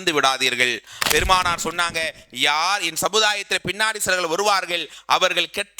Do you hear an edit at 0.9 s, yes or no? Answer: yes